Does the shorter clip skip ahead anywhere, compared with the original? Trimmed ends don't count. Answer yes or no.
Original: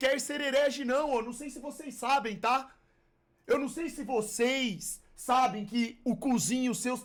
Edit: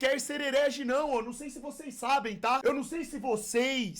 yes